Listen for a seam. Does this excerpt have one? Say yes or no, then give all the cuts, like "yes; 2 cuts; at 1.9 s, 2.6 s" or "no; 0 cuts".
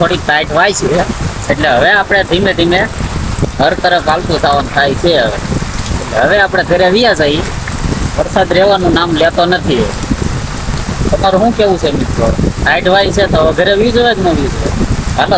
no; 0 cuts